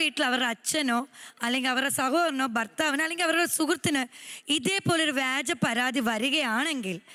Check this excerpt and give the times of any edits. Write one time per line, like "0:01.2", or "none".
none